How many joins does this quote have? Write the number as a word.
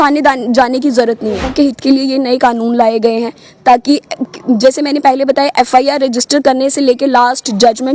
one